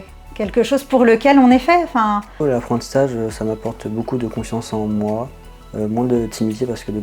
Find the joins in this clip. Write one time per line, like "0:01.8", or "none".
0:02.4